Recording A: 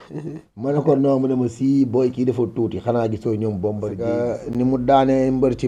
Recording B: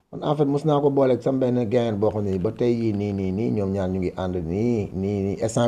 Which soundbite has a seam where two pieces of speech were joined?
A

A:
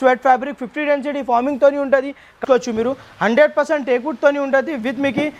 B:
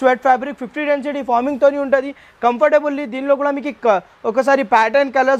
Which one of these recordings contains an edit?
A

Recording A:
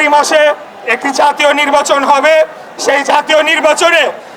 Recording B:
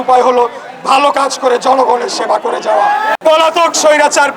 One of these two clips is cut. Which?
B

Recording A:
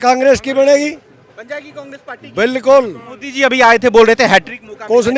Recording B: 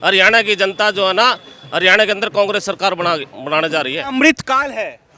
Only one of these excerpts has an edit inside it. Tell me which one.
B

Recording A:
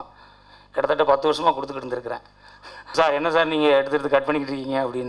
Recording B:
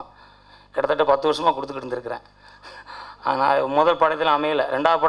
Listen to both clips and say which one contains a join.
A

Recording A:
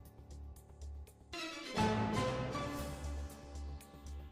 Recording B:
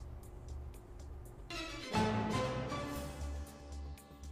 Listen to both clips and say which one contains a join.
A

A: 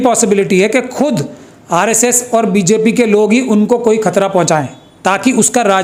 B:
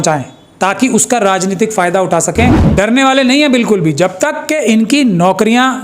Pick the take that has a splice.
B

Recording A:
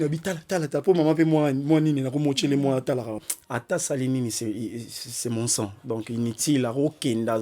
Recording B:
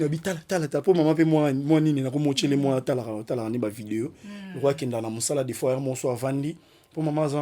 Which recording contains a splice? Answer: A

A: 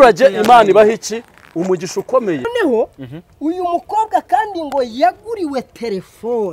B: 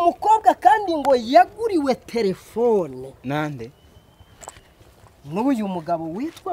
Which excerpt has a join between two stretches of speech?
A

